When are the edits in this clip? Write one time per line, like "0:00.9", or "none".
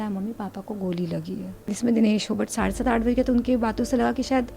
0:01.8